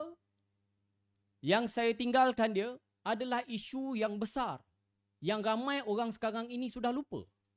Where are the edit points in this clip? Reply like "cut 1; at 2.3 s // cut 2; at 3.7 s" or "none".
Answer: none